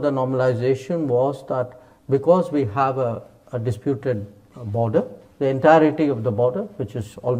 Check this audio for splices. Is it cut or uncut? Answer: uncut